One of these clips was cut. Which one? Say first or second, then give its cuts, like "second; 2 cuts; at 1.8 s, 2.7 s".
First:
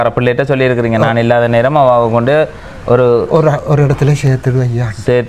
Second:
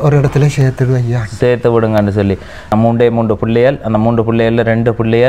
second; 1 cut; at 2.7 s